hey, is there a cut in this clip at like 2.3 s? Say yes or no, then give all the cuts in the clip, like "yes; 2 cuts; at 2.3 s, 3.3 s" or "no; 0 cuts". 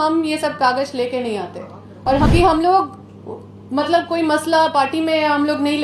yes; 1 cut; at 2.3 s